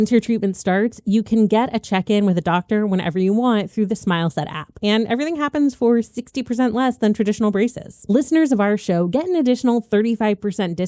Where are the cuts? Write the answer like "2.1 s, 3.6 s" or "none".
7.9 s